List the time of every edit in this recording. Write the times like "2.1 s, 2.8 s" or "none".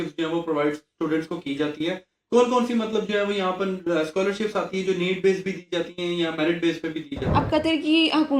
7.2 s